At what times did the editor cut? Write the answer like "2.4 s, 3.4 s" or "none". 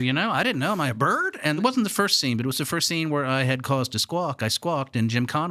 1.6 s, 2.9 s